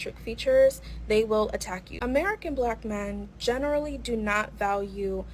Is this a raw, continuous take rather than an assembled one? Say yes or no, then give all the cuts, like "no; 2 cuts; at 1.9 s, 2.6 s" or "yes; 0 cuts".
no; 1 cut; at 1.8 s